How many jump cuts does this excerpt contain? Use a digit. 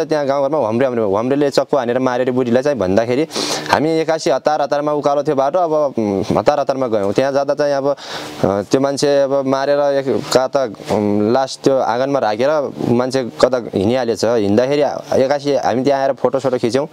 0